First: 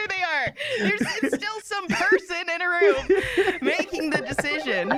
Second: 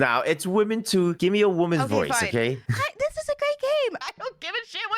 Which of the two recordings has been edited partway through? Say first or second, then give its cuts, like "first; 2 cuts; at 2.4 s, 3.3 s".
second; 3 cuts; at 1.2 s, 2.7 s, 4.0 s